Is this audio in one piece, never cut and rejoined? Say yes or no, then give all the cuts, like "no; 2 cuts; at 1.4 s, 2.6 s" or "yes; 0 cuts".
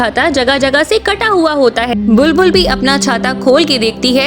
no; 1 cut; at 1.9 s